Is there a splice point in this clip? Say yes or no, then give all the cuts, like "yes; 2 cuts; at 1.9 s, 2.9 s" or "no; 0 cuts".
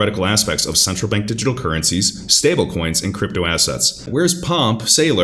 yes; 1 cut; at 4.0 s